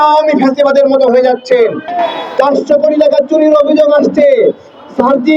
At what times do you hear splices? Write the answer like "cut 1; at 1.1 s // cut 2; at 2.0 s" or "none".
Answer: cut 1; at 1.8 s